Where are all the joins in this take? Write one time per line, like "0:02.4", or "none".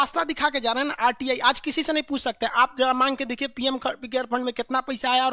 none